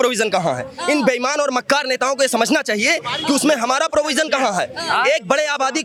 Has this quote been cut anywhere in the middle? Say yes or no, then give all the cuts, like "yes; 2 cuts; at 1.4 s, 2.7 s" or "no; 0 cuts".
no; 0 cuts